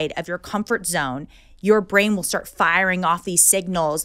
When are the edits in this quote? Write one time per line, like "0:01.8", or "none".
none

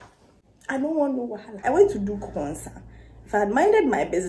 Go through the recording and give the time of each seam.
0:01.6

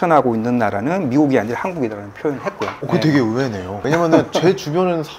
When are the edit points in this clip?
0:03.8

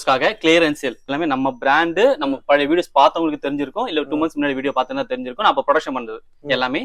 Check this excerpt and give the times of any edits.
0:01.2

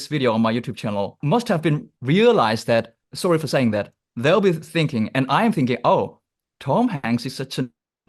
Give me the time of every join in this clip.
none

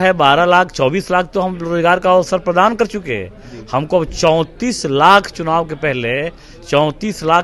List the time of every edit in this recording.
none

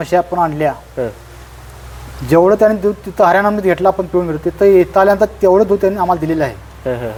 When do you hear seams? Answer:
none

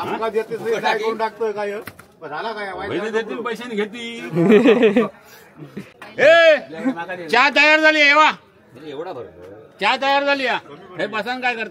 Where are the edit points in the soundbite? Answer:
none

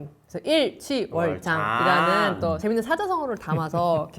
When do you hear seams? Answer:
0:02.6

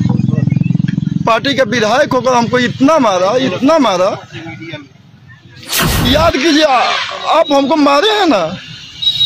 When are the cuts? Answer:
0:05.9

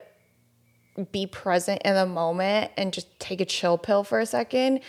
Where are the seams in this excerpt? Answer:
none

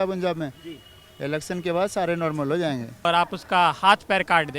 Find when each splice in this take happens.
0:03.1

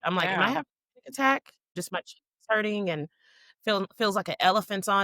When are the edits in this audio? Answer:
0:01.8

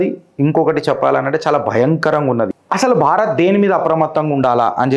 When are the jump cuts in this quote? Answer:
0:02.5

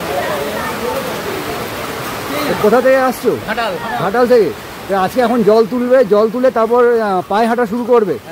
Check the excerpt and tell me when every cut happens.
none

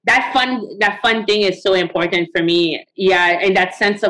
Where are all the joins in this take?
0:02.8

